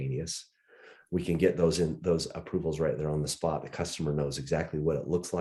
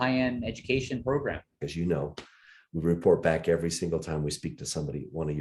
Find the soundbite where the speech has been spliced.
second; 1 cut; at 1.6 s

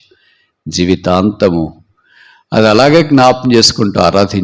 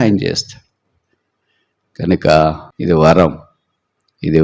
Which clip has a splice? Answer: second; 1 cut; at 2.7 s

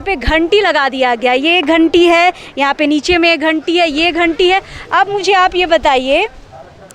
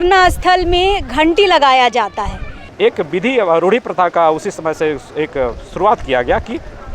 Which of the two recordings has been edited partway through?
second; 1 cut; at 2.7 s

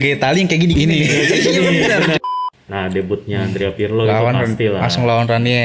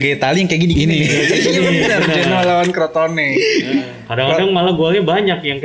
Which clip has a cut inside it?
first; 1 cut; at 2.2 s

